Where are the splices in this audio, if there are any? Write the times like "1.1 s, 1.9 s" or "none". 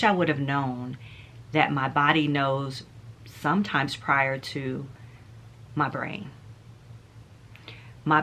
none